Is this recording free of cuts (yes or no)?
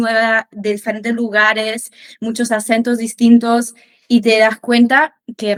yes